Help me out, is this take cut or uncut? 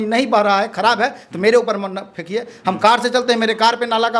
uncut